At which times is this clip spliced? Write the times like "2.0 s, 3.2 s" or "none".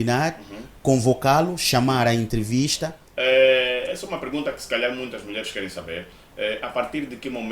3.0 s